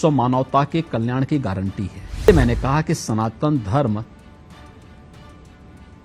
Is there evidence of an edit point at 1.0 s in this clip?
no; 1 cut; at 2.3 s

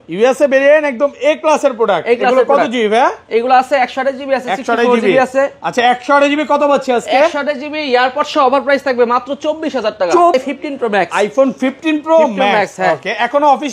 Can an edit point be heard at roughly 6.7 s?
no; 1 cut; at 10.3 s

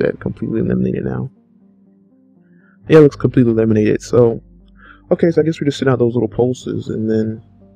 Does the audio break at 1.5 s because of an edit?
yes; 1 cut; at 1.5 s

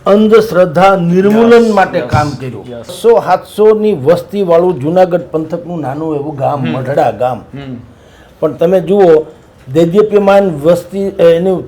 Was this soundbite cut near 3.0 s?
yes; 1 cut; at 3.0 s

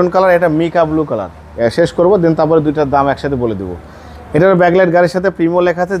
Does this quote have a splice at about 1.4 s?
no; 0 cuts

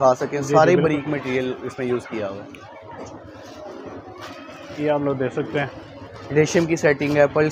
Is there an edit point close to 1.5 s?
no; 0 cuts

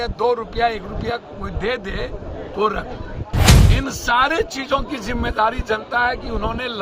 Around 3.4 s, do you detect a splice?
yes; 1 cut; at 3.4 s

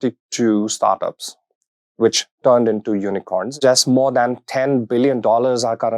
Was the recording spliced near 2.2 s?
no; 1 cut; at 3.5 s

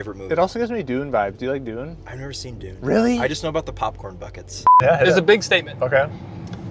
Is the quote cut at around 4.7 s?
yes; 1 cut; at 4.7 s

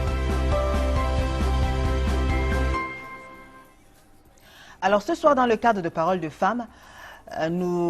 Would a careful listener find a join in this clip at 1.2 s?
no; 1 cut; at 3.5 s

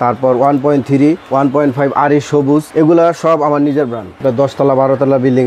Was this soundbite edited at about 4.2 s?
yes; 1 cut; at 4.2 s

